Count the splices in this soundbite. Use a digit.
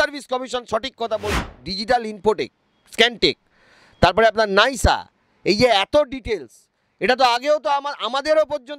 1